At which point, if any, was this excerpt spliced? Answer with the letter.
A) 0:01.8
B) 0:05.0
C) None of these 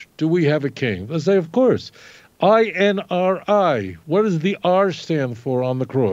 C